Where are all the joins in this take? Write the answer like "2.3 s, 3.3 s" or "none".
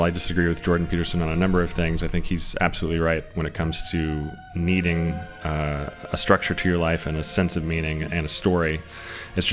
none